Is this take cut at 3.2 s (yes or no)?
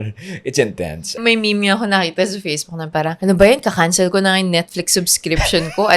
yes